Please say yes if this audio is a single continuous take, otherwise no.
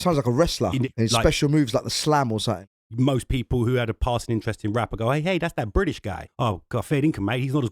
no